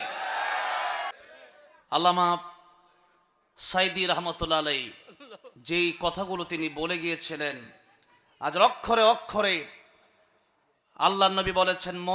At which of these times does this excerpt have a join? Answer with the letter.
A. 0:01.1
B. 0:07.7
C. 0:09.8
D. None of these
A